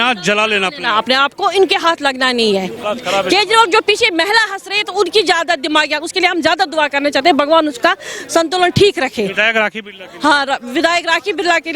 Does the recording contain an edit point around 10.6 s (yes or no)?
no